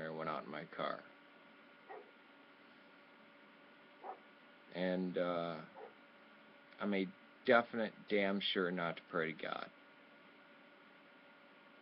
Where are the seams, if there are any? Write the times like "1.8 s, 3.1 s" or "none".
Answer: none